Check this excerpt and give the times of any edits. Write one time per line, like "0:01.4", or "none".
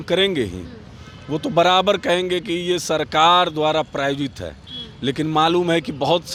none